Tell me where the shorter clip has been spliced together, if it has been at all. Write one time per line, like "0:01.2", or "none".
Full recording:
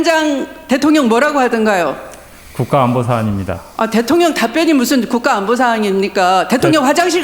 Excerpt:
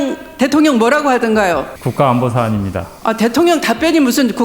0:01.8

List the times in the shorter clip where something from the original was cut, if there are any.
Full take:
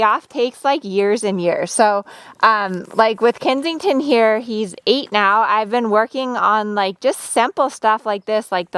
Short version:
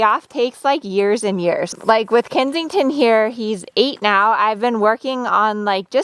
0:01.7

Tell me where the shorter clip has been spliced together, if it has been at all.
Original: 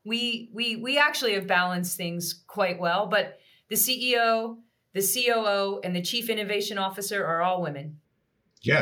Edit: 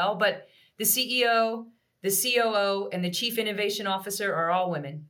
none

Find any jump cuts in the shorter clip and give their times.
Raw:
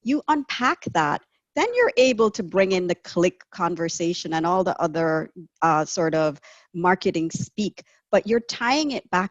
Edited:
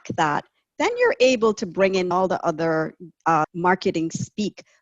0:02.1
0:03.5

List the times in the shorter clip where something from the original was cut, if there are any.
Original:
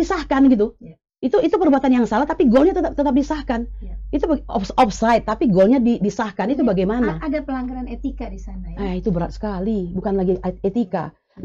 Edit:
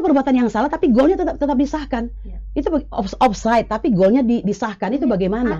none

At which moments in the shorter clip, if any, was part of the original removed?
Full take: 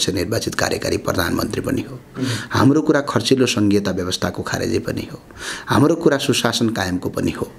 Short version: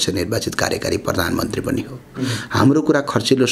none

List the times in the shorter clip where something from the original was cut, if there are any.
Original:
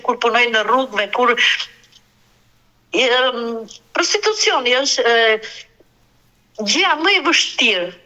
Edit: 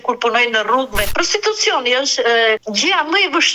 0:01.1
0:02.6

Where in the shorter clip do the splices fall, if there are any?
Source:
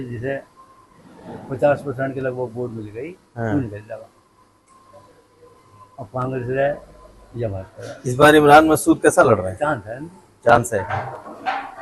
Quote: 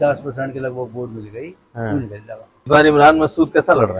0:02.7

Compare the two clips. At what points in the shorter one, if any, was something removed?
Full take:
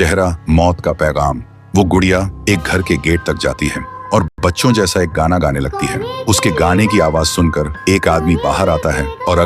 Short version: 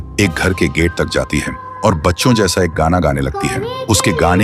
0:02.0

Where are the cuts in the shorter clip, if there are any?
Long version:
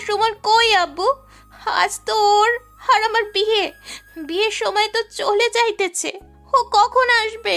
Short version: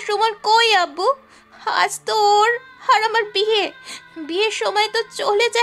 none

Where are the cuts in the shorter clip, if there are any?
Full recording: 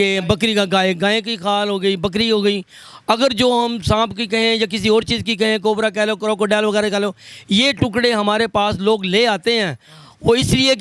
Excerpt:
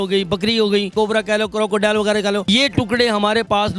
0:00.9
0:02.4

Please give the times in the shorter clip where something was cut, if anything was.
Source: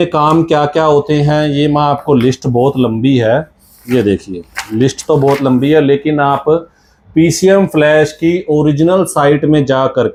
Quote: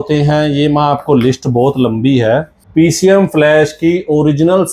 0:02.6

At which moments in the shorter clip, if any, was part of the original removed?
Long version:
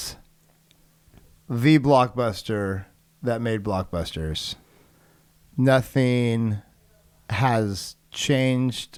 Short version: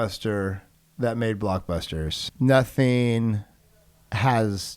0:02.2

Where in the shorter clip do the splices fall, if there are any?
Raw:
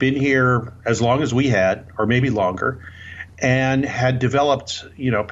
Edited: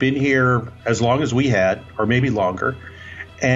none

